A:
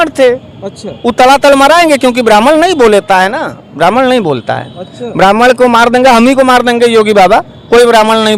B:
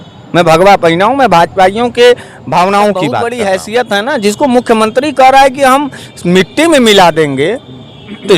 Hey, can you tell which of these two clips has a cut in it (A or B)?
B